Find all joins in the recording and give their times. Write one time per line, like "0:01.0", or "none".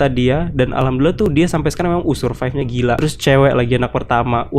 0:03.0